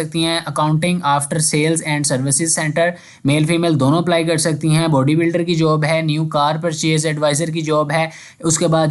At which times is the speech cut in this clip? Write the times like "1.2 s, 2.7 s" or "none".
none